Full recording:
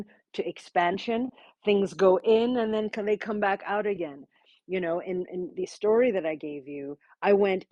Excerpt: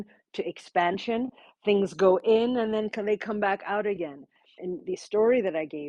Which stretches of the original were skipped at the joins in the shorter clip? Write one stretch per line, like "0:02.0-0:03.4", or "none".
0:04.6-0:05.3